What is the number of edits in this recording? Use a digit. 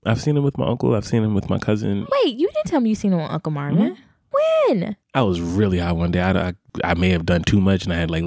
0